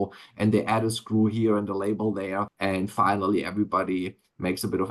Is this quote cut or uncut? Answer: cut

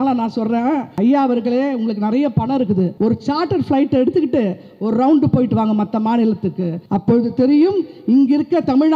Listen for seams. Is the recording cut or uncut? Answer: cut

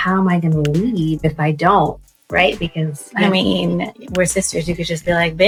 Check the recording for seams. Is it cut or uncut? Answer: uncut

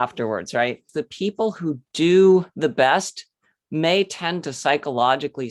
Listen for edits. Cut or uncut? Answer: cut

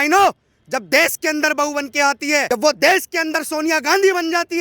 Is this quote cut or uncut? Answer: cut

